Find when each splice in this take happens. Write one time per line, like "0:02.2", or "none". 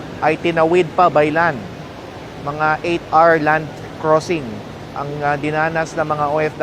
none